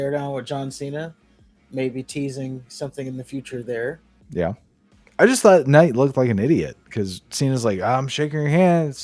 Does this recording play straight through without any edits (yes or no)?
yes